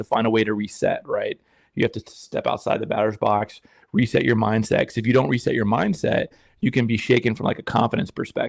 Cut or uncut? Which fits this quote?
uncut